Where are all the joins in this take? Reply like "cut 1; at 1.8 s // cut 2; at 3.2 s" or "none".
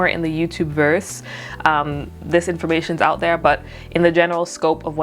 none